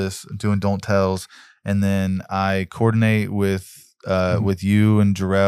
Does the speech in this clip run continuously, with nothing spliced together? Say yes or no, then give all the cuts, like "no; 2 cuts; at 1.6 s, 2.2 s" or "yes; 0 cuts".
yes; 0 cuts